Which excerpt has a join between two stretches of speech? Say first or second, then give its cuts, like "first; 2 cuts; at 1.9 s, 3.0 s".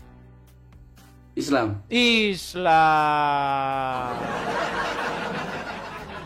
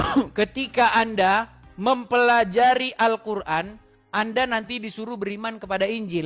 first; 1 cut; at 1.3 s